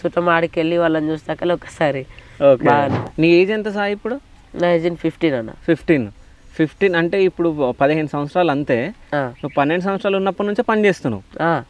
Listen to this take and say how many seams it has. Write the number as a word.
one